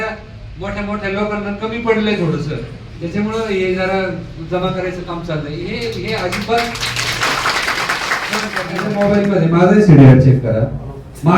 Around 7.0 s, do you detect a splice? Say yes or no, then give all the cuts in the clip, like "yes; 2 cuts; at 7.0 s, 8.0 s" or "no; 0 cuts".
no; 1 cut; at 8.9 s